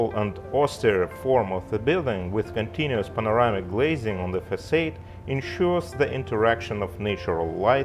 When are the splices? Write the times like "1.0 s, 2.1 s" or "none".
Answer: none

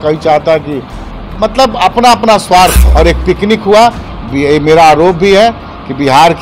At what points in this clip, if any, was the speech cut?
2.8 s

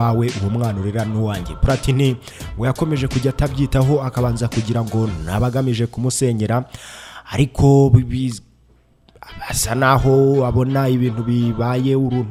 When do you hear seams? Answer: none

